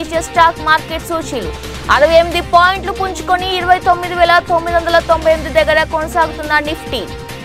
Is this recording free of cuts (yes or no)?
yes